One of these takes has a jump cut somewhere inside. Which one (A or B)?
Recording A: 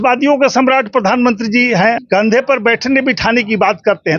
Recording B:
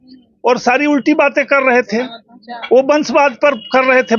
A